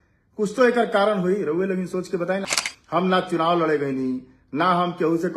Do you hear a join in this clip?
yes; 1 cut; at 2.4 s

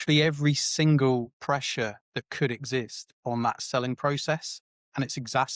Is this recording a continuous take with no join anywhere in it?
yes; 0 cuts

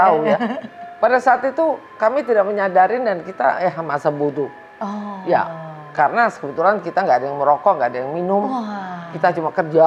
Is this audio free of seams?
yes; 0 cuts

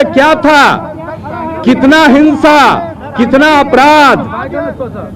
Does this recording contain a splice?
no; 0 cuts

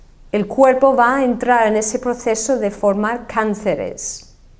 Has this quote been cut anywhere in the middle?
no; 0 cuts

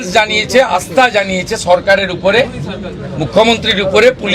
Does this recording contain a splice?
no; 0 cuts

